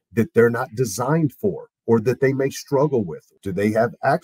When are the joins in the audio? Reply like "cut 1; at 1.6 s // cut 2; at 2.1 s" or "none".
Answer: cut 1; at 3.2 s